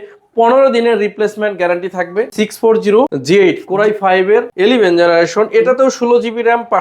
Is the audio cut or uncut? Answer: cut